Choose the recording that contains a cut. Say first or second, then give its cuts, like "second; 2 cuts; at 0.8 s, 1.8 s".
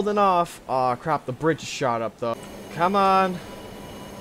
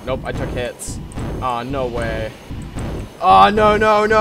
first; 1 cut; at 2.3 s